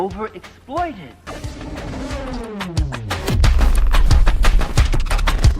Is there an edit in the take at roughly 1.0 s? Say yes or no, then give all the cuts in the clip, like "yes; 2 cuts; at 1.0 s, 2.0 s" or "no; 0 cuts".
yes; 1 cut; at 1.0 s